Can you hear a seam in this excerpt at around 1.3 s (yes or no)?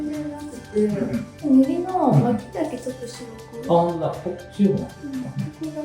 yes